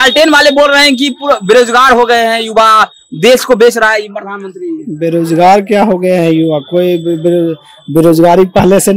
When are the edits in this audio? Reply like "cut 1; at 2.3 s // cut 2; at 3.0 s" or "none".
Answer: none